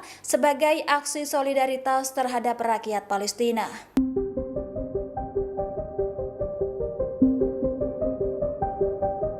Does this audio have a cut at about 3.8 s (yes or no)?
yes